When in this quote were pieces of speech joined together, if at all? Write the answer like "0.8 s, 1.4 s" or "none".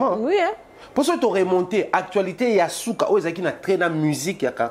none